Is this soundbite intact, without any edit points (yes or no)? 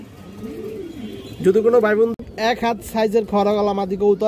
no